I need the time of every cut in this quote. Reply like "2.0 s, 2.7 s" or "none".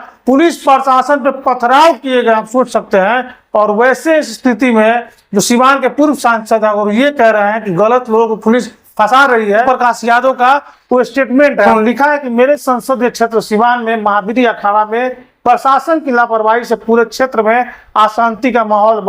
9.6 s, 11.7 s